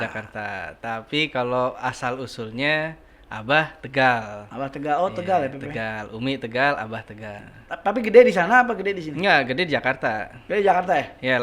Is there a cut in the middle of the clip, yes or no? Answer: yes